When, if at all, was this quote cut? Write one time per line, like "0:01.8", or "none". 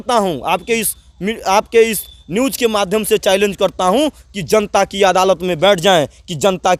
none